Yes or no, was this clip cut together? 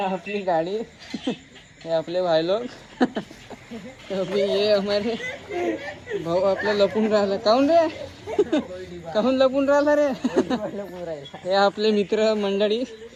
no